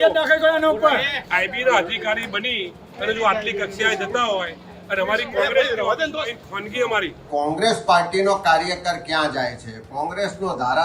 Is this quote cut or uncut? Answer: cut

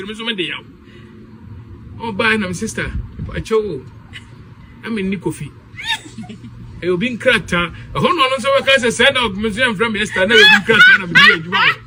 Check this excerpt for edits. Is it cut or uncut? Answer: uncut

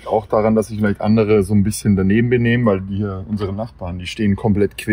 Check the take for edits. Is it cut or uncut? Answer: uncut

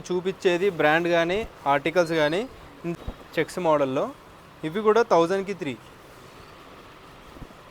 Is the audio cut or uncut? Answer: cut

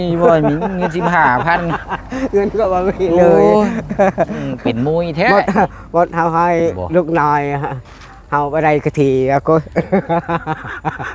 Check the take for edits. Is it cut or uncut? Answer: uncut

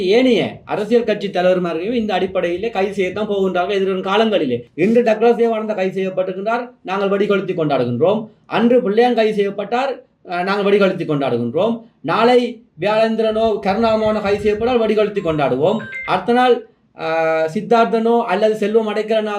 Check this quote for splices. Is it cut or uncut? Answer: cut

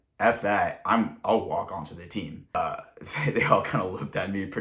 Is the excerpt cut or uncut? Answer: cut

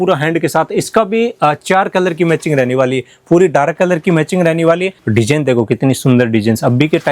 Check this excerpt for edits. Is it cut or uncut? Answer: cut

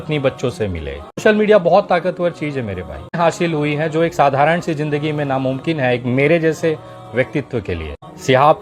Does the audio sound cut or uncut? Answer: cut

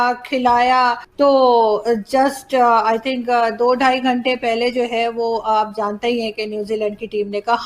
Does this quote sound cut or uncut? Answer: cut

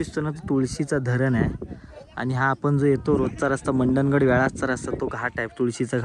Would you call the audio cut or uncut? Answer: uncut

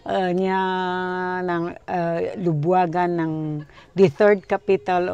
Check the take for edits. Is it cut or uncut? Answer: uncut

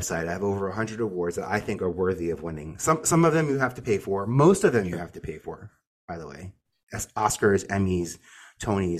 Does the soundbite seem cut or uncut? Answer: uncut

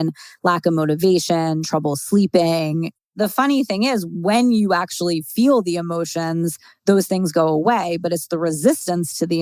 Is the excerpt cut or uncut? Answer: cut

